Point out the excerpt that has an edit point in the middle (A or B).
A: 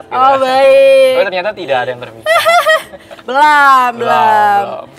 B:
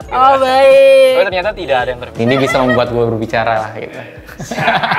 B